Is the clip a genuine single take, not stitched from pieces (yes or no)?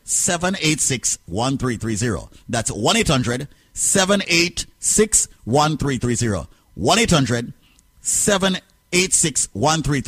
yes